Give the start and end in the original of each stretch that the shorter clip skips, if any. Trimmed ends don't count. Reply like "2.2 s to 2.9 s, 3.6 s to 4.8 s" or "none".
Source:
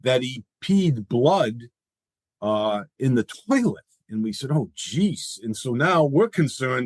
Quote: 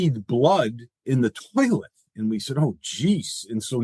1.8 s to 2.9 s